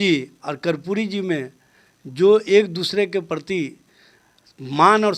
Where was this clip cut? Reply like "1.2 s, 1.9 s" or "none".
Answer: none